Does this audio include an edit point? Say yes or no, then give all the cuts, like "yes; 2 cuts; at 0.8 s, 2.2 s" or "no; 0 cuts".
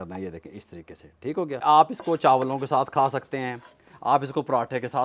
yes; 1 cut; at 1.6 s